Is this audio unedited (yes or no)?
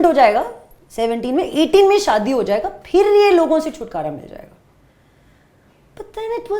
yes